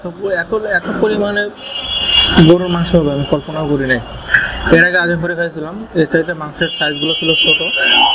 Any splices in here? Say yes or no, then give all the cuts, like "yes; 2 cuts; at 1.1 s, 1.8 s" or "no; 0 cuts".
no; 0 cuts